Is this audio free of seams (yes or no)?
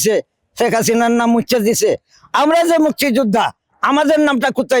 yes